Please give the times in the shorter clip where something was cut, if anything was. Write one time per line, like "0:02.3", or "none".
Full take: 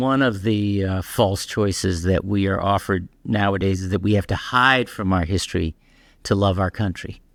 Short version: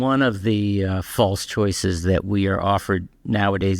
none